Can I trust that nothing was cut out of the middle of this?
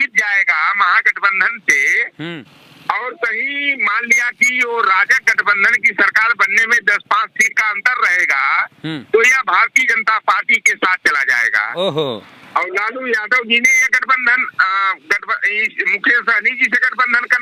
yes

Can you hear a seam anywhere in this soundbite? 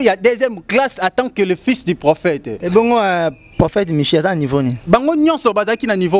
yes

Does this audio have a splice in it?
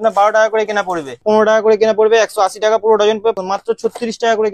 yes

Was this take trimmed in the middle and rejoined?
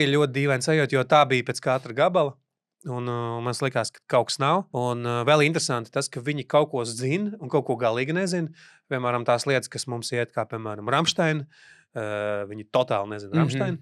yes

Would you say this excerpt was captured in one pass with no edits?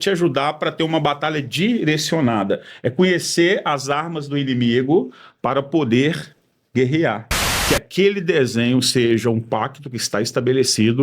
no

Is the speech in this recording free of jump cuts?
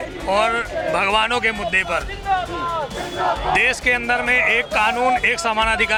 yes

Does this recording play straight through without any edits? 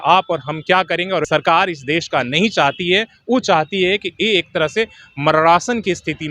no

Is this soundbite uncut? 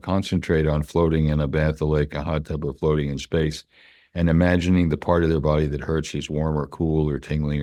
yes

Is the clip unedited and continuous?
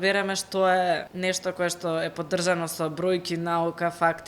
no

